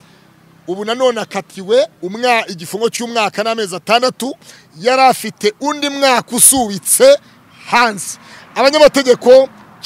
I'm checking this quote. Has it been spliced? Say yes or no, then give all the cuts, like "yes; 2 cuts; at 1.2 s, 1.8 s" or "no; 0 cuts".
no; 0 cuts